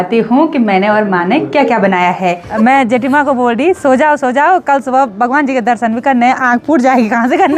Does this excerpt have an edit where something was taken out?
yes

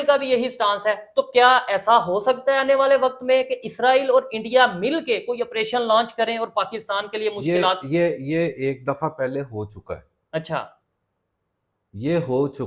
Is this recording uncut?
yes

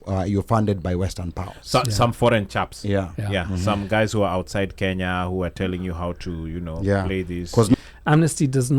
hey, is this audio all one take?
no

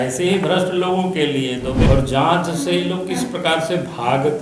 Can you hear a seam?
yes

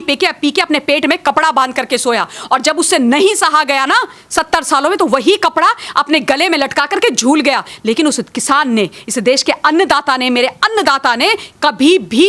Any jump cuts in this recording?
no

